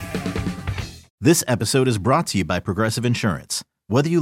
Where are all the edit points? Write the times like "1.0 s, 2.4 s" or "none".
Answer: 1.0 s